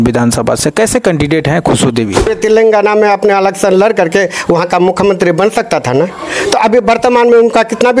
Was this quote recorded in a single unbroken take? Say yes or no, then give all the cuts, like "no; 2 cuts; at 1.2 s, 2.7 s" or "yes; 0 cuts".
no; 1 cut; at 2.3 s